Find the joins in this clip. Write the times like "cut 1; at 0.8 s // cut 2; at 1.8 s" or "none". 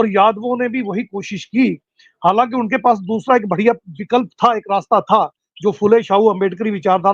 none